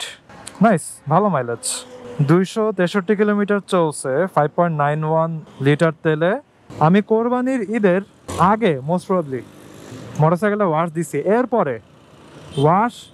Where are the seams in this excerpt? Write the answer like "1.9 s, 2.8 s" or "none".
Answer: 6.6 s